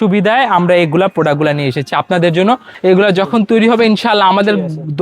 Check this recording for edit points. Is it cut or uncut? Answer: cut